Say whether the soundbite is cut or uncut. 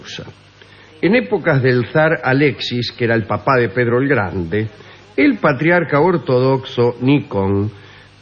uncut